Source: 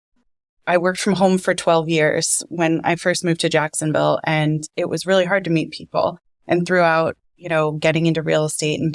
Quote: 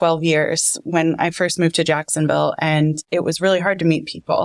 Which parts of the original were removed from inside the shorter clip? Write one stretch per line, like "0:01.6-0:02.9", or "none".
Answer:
none